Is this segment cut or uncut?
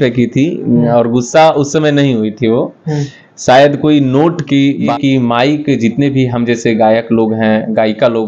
cut